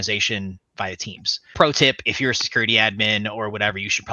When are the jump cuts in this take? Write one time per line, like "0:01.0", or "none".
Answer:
0:01.5